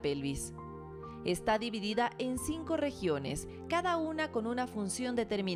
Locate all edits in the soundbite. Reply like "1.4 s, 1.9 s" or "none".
none